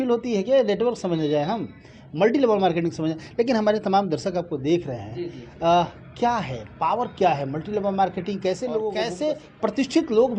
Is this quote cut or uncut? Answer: cut